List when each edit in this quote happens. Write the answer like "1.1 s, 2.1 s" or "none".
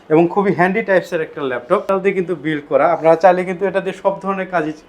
1.9 s